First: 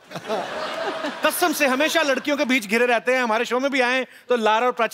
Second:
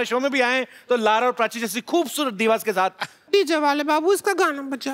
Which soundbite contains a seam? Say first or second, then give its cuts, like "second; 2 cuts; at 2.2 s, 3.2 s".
second; 1 cut; at 3.2 s